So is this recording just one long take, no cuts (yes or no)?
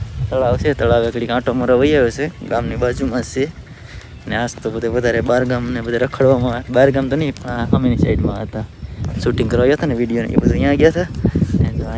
yes